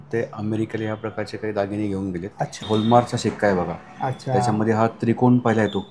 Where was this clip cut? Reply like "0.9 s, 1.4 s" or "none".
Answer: 2.6 s